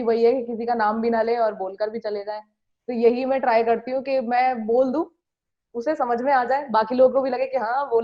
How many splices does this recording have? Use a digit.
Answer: 0